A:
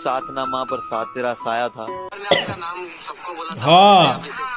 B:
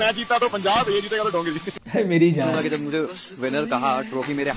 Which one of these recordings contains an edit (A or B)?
A